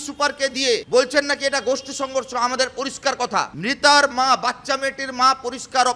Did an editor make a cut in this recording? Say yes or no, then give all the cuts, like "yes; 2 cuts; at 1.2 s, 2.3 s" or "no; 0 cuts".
yes; 2 cuts; at 0.8 s, 3.5 s